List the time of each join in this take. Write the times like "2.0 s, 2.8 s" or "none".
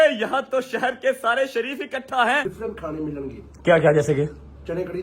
2.4 s